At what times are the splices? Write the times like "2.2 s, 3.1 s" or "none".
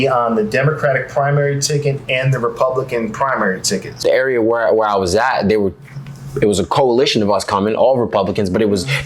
3.9 s